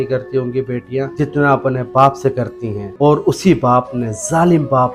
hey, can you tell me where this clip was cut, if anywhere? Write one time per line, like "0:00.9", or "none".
none